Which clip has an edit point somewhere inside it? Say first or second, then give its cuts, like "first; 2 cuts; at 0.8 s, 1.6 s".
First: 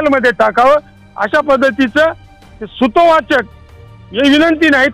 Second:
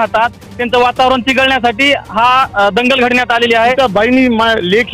second; 1 cut; at 3.7 s